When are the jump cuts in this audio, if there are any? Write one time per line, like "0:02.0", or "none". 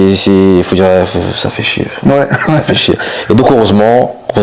none